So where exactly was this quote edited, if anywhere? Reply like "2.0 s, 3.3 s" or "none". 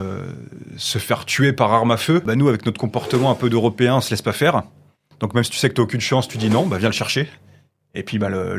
2.3 s